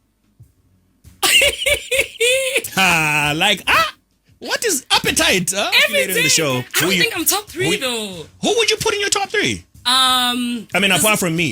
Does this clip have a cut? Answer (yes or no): yes